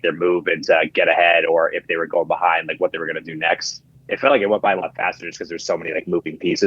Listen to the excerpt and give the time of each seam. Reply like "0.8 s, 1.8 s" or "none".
4.0 s